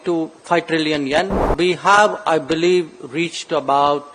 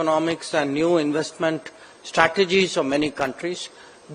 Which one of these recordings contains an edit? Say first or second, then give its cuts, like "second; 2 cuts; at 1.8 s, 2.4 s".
first; 1 cut; at 1.5 s